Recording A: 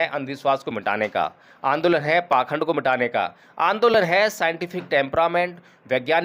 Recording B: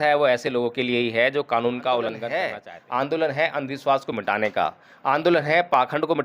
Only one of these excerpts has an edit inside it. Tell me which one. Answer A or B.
B